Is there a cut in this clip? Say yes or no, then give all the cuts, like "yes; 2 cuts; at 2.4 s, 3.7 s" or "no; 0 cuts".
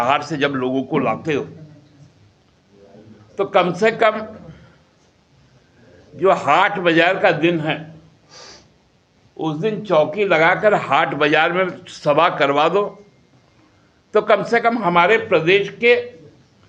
no; 0 cuts